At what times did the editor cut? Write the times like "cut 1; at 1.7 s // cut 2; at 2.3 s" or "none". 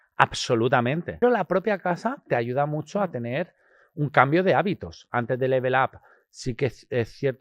cut 1; at 1.2 s // cut 2; at 5.1 s